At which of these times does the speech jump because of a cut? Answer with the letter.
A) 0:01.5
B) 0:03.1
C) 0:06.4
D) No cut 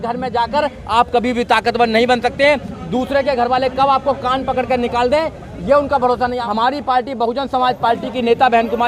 C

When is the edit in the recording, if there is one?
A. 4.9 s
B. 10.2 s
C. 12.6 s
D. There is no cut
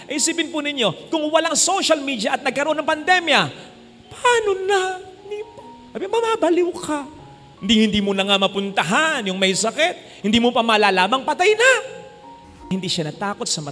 C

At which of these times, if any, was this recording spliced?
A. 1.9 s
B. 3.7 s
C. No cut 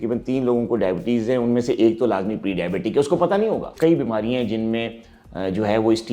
B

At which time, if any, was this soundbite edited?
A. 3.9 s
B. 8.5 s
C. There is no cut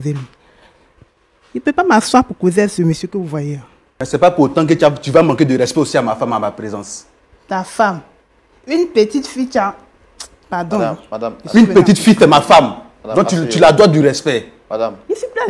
A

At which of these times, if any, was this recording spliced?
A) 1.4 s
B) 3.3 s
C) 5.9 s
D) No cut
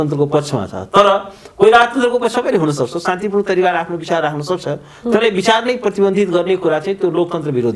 D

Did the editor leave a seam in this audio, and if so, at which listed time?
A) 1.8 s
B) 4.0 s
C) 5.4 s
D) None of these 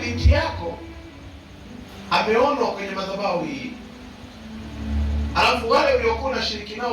A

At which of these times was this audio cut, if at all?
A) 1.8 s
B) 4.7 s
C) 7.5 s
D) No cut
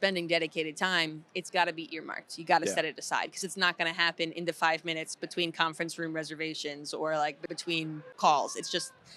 C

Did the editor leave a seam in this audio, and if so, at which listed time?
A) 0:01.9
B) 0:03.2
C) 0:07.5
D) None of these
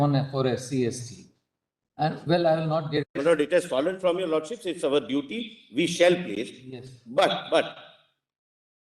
B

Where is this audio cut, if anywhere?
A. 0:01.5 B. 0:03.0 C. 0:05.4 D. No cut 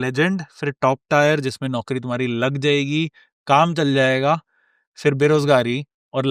D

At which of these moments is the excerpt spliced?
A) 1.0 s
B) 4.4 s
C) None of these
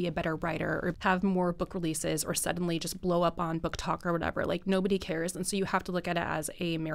A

